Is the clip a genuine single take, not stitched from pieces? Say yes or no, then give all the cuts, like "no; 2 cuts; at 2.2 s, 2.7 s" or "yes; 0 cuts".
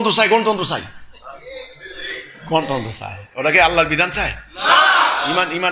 yes; 0 cuts